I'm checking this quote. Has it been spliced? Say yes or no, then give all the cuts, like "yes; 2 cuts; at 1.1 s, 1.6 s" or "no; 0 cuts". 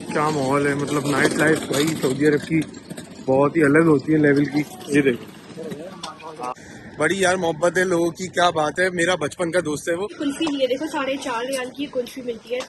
yes; 2 cuts; at 6.5 s, 10.1 s